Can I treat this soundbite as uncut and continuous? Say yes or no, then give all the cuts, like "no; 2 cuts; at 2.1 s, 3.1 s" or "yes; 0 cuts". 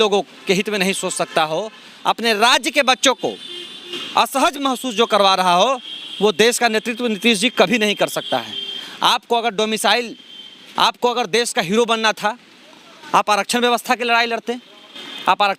yes; 0 cuts